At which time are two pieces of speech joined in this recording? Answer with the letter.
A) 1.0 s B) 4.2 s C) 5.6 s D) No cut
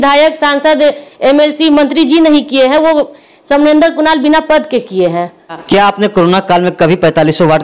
C